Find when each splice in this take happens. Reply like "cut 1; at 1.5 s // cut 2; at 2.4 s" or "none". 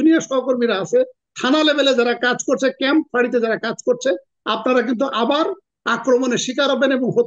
none